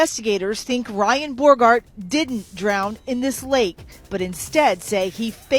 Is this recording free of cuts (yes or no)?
yes